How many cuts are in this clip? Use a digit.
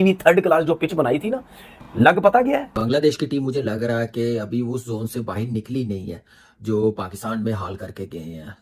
1